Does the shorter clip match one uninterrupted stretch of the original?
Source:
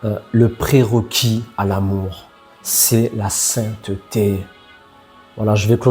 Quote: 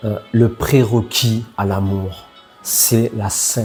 yes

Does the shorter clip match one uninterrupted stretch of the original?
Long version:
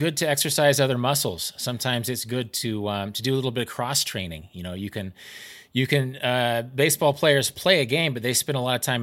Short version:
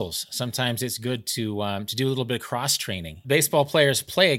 no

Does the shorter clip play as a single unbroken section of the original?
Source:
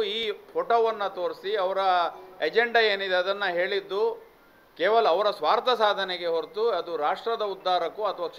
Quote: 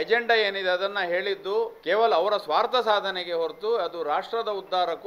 no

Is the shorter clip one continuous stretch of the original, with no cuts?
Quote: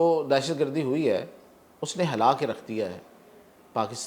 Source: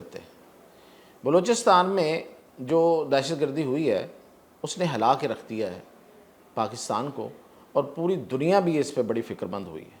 yes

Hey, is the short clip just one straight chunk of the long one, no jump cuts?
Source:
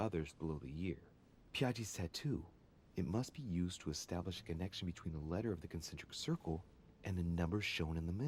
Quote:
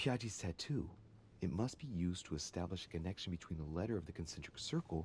yes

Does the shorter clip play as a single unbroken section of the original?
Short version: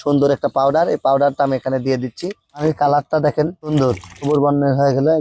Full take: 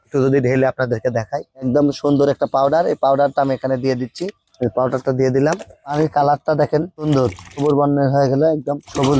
no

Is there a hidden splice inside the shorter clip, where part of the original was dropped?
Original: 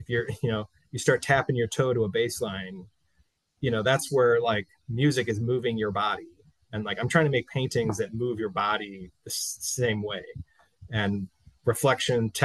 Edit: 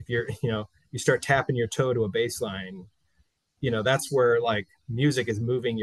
no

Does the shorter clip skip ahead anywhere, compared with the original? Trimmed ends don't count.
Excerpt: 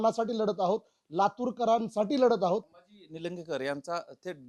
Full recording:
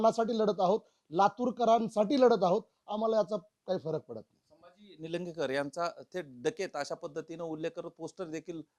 yes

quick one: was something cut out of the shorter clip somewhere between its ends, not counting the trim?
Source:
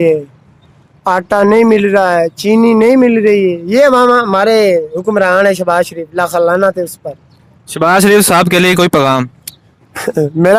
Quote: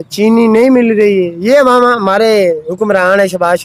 no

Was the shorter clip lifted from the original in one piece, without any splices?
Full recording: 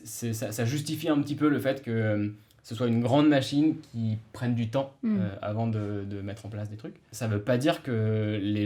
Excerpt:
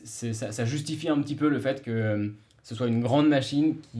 yes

